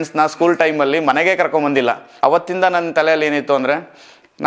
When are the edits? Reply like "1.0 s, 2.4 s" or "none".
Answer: 2.1 s